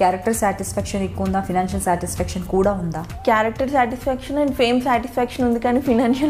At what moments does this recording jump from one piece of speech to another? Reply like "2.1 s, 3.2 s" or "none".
3.0 s